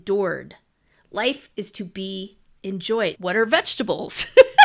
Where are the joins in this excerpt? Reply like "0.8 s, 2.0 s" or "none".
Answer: 3.2 s